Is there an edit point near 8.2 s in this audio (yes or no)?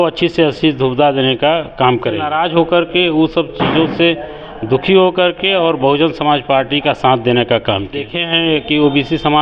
yes